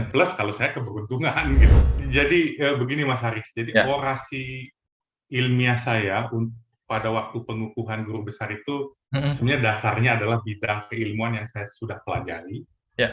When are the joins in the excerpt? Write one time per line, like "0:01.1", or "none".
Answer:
0:01.7